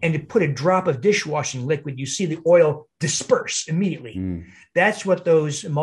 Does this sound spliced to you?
no; 0 cuts

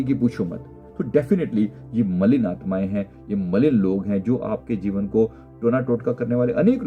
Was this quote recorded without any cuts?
yes; 0 cuts

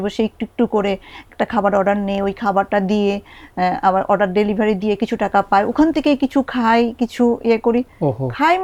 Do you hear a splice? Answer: no; 0 cuts

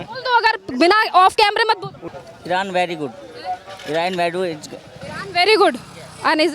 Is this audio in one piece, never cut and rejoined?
no; 1 cut; at 1.9 s

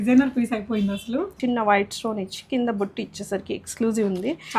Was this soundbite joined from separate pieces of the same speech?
yes; 1 cut; at 1.3 s

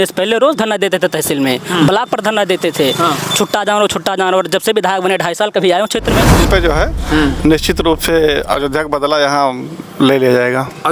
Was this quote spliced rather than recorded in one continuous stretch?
yes; 1 cut; at 6.5 s

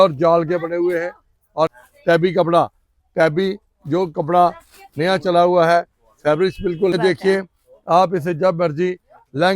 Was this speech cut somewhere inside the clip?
yes; 2 cuts; at 1.7 s, 6.9 s

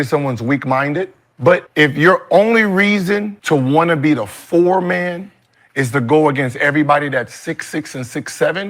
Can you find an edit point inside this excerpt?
yes; 2 cuts; at 1.6 s, 3.3 s

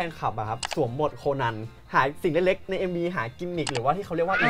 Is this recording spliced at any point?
no; 0 cuts

